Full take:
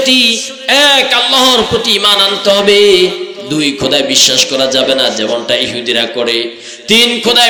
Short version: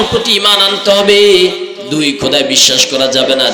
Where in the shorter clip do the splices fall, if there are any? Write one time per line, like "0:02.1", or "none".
none

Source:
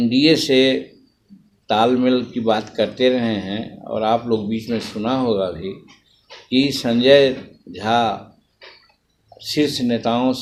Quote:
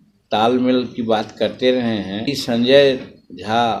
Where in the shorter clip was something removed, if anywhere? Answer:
0:02.3

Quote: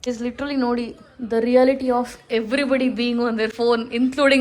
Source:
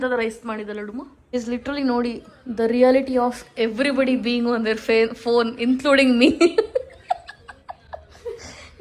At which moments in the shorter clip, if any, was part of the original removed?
0:03.5

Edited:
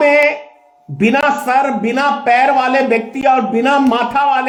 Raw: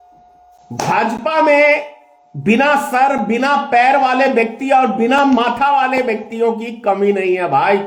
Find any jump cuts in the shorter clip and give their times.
none

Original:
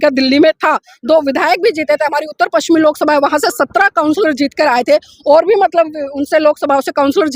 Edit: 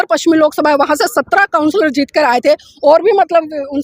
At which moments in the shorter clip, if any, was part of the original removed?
none

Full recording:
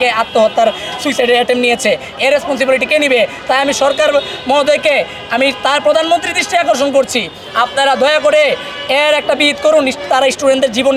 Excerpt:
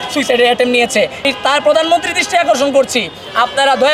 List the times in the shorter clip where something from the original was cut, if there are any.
0:01.3

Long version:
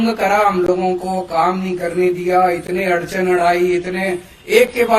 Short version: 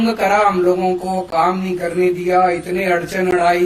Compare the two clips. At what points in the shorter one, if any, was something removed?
none

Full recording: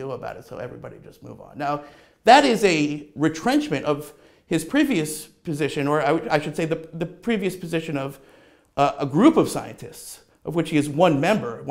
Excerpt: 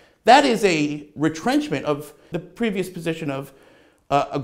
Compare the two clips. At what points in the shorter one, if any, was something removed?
0:02.3

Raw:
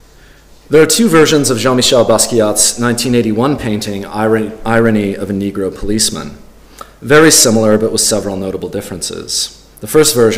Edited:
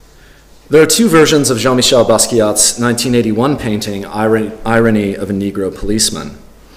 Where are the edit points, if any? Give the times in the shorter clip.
none

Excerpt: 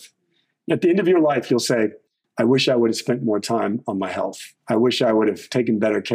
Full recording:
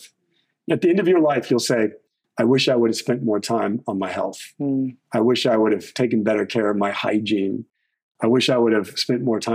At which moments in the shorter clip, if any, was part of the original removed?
0:04.5

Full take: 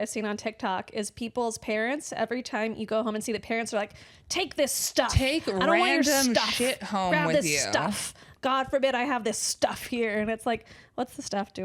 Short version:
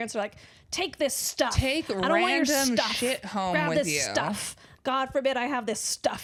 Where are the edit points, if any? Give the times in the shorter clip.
none

